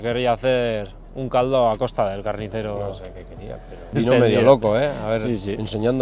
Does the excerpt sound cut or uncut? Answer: uncut